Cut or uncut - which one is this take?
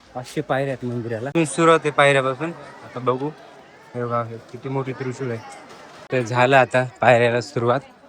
cut